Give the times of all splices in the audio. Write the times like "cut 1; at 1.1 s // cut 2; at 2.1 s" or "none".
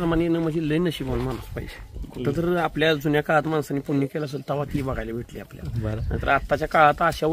none